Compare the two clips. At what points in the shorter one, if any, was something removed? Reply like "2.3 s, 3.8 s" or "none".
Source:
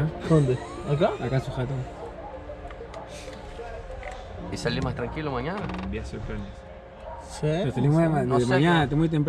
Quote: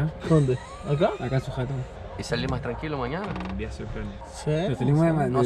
1.9 s, 4.3 s